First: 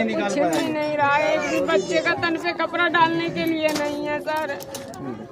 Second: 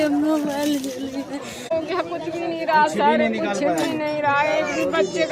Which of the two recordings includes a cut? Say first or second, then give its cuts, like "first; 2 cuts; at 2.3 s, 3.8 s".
second; 1 cut; at 1.7 s